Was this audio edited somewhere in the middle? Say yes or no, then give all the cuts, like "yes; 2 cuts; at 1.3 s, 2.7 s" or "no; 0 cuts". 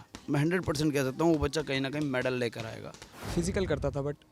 yes; 1 cut; at 3.0 s